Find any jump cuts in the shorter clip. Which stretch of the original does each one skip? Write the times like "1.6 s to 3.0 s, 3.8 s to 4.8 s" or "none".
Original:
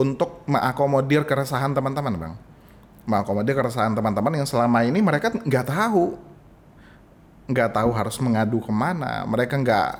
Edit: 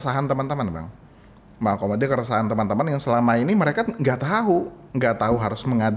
6.3 s to 7.3 s